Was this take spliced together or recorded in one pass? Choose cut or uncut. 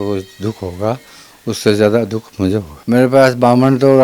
cut